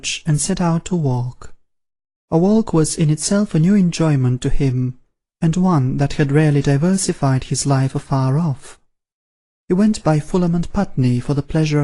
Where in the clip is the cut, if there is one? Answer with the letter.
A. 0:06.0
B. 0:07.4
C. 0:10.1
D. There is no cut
C